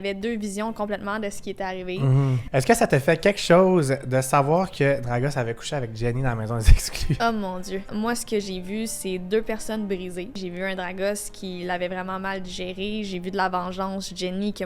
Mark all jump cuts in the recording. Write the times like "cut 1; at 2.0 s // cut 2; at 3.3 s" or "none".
cut 1; at 2.4 s // cut 2; at 7.9 s // cut 3; at 10.4 s